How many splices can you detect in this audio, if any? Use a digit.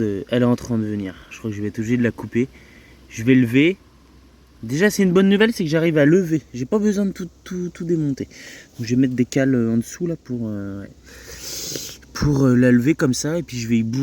0